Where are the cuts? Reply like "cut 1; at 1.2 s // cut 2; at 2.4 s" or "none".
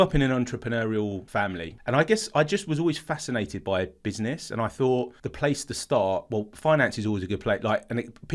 cut 1; at 1.3 s // cut 2; at 5.2 s